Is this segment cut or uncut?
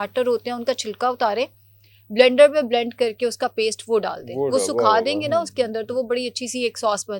uncut